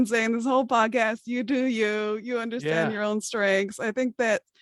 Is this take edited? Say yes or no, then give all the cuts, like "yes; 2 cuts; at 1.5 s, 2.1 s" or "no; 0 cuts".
no; 0 cuts